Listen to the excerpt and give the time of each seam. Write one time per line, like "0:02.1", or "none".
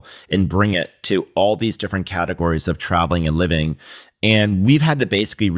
none